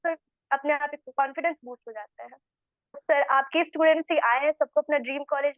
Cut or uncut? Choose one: cut